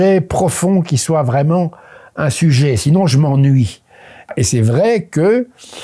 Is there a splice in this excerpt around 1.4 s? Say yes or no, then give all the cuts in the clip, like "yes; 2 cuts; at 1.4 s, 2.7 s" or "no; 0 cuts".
no; 1 cut; at 4.3 s